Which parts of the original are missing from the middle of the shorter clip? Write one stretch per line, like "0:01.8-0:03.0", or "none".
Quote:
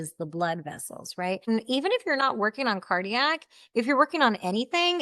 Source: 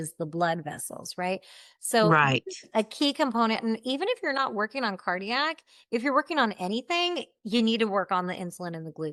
0:01.4-0:03.6